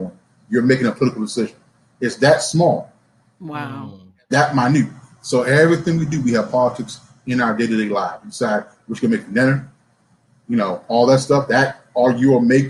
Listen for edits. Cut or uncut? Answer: uncut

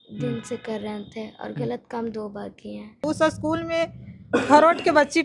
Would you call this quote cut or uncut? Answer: cut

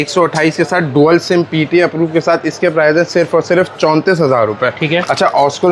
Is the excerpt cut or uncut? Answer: uncut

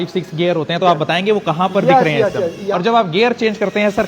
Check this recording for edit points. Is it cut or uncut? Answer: cut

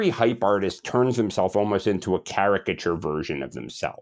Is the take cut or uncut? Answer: uncut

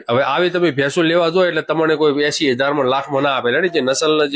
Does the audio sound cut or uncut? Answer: uncut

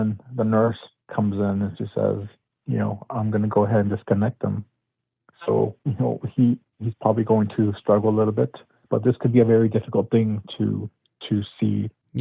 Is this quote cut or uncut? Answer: uncut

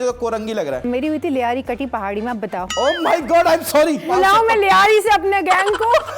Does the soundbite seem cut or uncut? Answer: cut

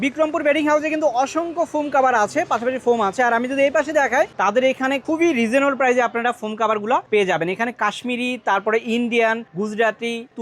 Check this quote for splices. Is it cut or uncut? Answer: cut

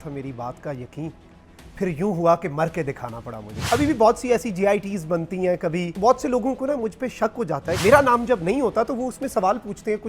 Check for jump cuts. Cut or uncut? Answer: cut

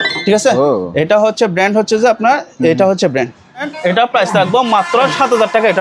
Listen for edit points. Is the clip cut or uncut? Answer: cut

